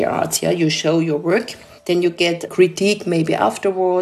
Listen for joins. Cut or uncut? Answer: uncut